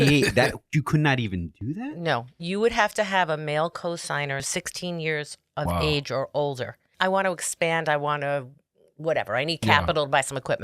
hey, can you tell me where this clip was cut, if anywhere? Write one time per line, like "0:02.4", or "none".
0:04.5
0:06.9